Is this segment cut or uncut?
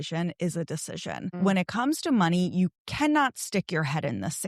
cut